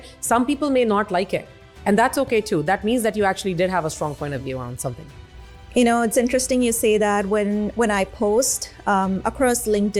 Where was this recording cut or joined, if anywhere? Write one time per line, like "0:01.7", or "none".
none